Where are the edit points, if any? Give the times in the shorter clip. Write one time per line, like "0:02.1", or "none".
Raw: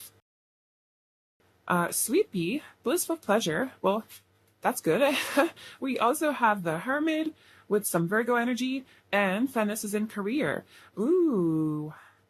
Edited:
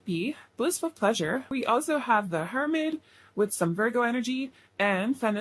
0:01.5